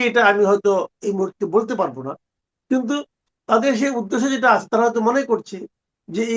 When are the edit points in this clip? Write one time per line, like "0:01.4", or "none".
none